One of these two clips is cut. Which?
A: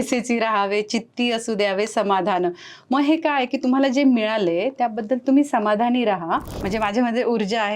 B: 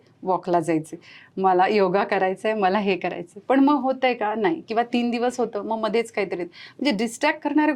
A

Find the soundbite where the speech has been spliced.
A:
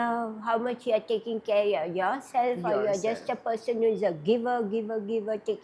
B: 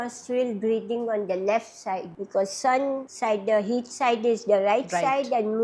B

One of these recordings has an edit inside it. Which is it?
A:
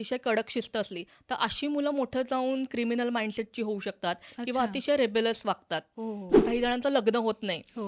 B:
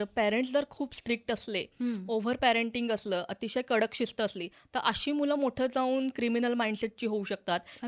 A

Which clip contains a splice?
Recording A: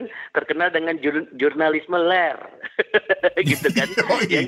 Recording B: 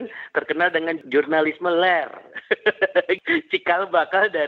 B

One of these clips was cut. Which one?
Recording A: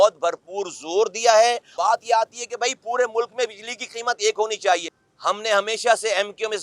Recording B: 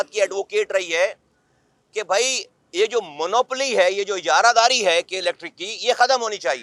A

